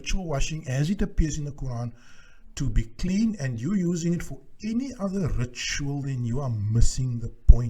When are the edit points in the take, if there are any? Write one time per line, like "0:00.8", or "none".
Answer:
none